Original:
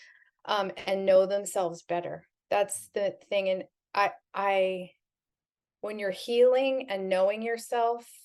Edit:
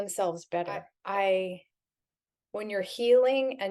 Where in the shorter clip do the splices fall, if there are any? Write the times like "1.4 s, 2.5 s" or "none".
0.9 s